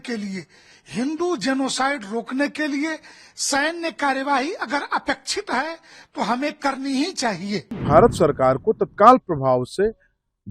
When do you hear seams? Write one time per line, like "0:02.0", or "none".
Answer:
0:07.8

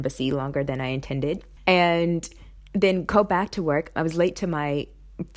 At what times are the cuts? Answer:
0:01.5
0:03.9

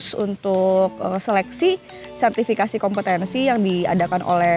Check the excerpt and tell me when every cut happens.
none

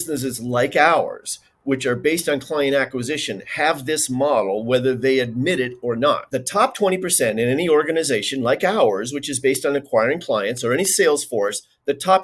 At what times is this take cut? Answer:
0:06.3

